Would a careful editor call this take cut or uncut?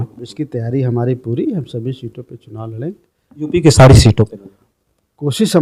uncut